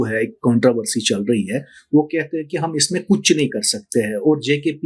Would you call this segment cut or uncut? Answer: uncut